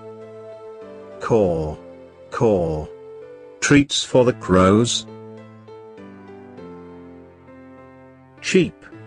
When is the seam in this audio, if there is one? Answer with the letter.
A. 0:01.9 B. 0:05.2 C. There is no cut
B